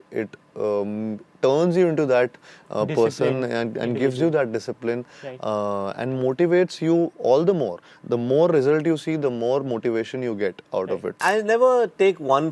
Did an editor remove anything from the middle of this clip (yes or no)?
yes